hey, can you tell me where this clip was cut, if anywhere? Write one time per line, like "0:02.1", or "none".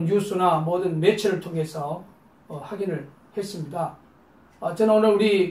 0:04.0